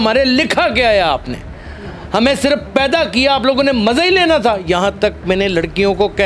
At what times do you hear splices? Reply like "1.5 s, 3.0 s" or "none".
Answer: none